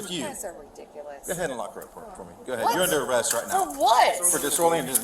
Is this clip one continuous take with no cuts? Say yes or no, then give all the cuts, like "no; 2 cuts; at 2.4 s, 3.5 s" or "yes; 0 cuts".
no; 1 cut; at 2.3 s